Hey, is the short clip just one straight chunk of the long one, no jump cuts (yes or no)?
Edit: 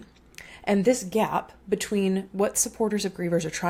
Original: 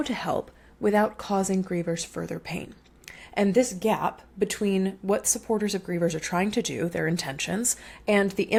yes